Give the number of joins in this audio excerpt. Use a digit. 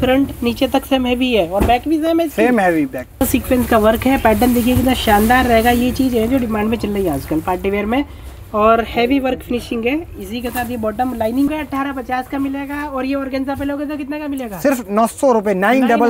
2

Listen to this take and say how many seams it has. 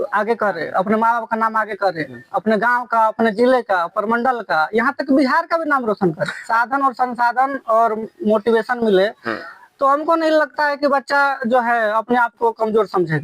1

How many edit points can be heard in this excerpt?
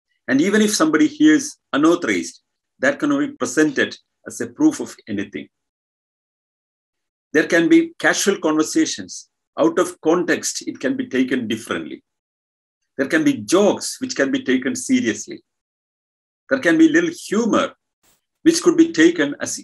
0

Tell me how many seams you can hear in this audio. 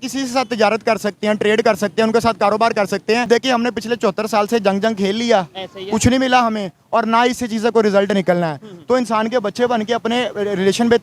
1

